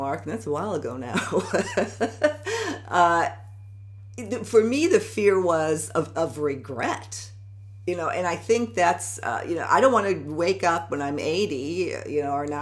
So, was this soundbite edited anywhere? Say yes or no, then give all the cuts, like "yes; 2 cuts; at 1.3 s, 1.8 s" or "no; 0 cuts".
no; 0 cuts